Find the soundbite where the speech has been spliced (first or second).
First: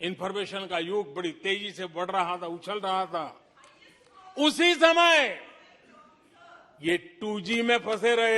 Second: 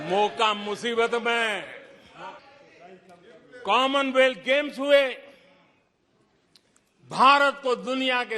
second